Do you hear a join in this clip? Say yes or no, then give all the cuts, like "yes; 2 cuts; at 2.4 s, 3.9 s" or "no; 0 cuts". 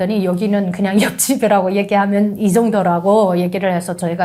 no; 0 cuts